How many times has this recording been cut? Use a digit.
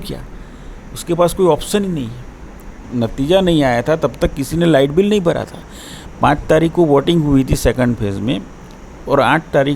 1